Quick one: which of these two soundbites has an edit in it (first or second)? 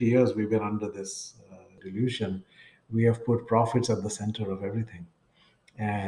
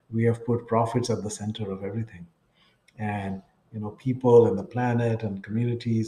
first